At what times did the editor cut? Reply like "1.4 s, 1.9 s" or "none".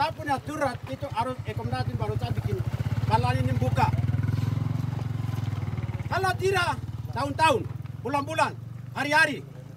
none

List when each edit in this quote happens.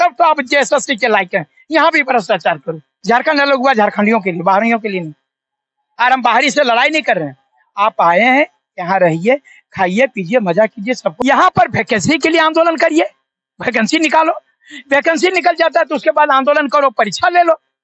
2.9 s, 11.2 s

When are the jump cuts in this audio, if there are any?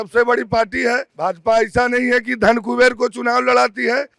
1.1 s

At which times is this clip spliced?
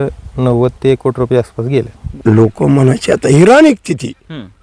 2.0 s

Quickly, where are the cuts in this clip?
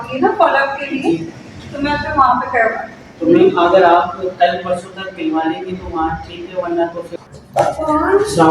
7.1 s

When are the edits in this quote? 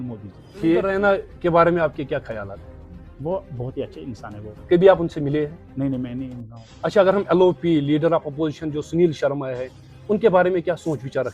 0.9 s

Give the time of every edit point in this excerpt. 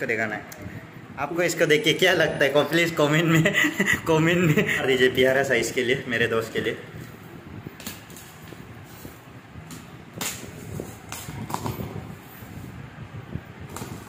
none

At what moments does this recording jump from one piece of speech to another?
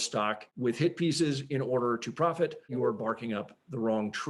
2.7 s

